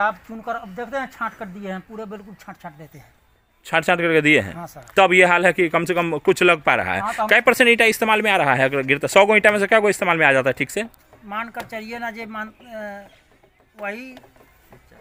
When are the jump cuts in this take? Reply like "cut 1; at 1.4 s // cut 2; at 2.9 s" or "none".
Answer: none